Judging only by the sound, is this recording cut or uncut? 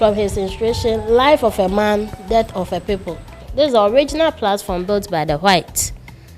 cut